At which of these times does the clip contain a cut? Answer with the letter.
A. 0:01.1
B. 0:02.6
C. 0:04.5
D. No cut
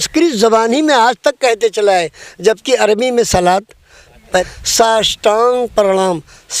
C